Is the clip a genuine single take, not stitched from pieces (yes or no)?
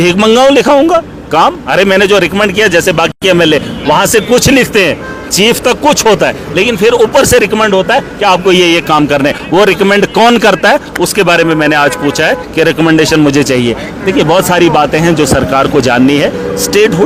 yes